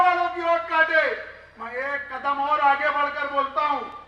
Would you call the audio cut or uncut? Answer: uncut